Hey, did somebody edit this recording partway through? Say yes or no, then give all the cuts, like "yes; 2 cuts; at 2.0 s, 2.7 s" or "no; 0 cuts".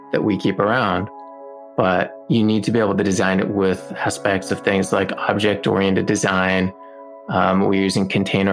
no; 0 cuts